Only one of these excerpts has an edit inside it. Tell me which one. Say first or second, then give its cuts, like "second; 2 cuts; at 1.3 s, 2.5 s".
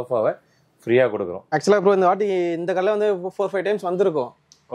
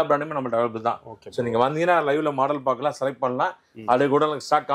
first; 1 cut; at 1.4 s